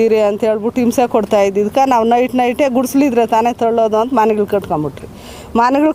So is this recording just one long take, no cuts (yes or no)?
yes